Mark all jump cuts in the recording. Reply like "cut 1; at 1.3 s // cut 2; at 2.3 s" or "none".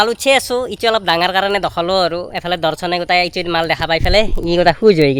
none

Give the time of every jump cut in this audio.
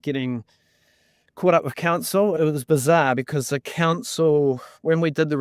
cut 1; at 2.3 s

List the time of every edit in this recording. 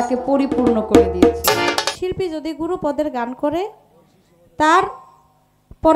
cut 1; at 2.0 s

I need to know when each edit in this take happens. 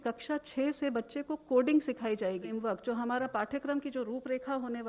cut 1; at 2.5 s

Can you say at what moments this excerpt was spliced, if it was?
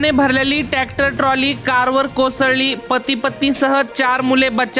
none

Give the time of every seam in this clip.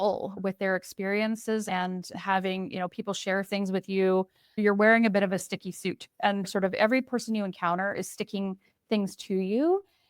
cut 1; at 4.6 s

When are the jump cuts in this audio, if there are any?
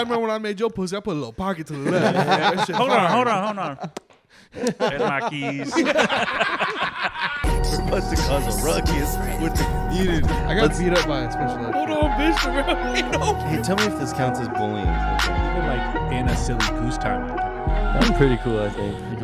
cut 1; at 7.4 s

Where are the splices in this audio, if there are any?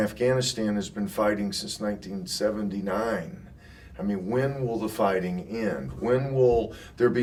none

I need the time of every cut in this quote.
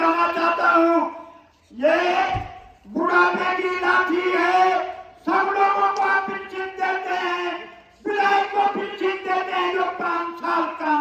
none

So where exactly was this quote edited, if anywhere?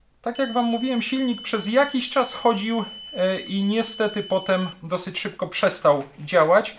none

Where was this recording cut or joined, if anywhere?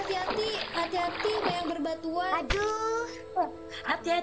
cut 1; at 2.9 s

